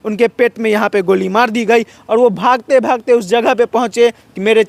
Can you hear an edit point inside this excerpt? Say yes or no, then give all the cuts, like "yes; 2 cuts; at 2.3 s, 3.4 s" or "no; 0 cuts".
no; 0 cuts